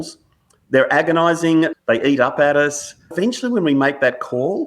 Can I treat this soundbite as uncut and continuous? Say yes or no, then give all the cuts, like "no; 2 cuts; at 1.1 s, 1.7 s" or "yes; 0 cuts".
no; 2 cuts; at 1.7 s, 3.1 s